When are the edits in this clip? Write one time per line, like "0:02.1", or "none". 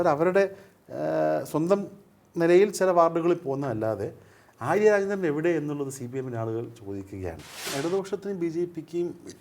0:07.7